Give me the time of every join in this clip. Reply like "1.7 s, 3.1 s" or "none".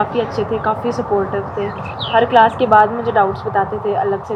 none